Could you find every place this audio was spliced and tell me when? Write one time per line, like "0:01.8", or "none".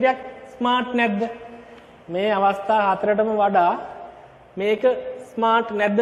none

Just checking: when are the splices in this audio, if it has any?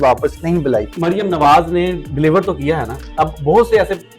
0:00.9

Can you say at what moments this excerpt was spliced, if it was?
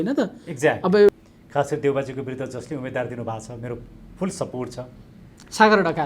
0:01.1

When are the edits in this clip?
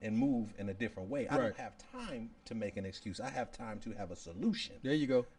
none

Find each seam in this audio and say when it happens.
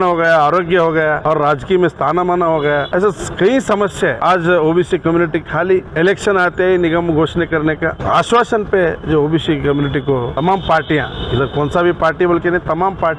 0:01.2
0:02.9
0:04.2
0:05.9
0:08.0
0:10.3

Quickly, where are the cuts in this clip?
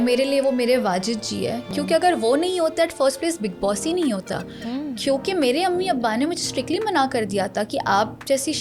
none

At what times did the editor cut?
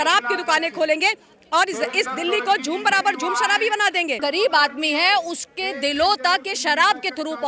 0:04.2

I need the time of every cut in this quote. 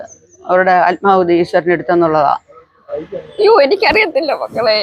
0:02.9

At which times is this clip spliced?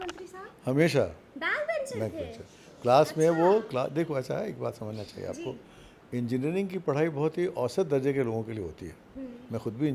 none

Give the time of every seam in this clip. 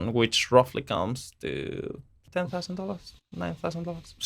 0:02.3

